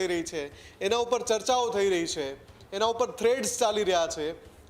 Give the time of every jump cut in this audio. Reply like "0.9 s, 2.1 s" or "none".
none